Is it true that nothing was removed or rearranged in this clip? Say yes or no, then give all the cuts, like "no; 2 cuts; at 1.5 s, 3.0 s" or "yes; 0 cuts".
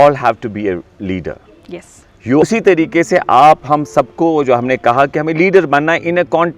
no; 1 cut; at 2.4 s